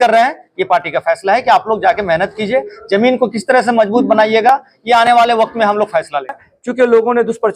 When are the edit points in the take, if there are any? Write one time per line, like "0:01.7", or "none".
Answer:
0:06.5